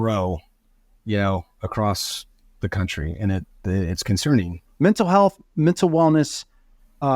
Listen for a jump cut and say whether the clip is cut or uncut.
cut